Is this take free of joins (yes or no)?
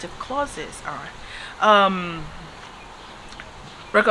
yes